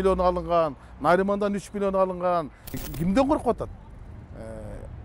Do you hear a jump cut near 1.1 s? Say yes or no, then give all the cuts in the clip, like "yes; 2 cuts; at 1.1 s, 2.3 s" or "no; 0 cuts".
no; 1 cut; at 2.8 s